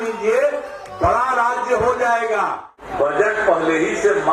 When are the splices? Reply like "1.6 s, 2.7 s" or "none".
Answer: 2.9 s